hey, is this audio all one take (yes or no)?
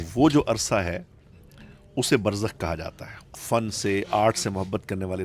no